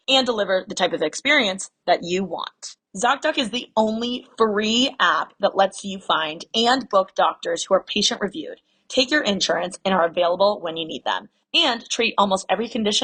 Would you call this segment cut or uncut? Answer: uncut